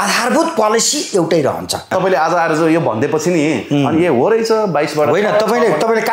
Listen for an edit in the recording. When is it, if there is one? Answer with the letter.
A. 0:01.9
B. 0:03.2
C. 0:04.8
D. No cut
A